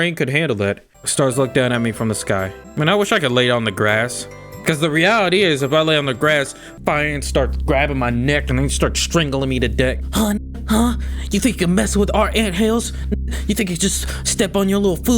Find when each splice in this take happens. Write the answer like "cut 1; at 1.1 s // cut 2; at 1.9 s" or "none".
cut 1; at 0.9 s